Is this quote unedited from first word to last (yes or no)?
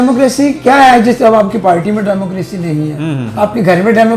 yes